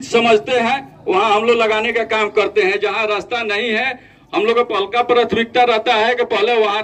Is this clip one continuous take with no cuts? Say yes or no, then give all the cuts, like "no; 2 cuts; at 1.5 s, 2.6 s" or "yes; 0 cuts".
yes; 0 cuts